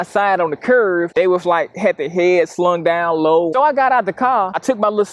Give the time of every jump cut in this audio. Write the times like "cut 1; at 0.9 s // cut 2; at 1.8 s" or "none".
cut 1; at 3.5 s